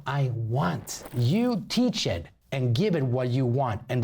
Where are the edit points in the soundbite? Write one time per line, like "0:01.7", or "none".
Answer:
0:01.1